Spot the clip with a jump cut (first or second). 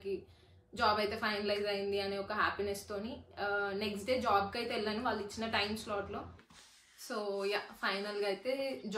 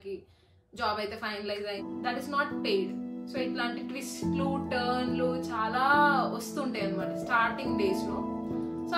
second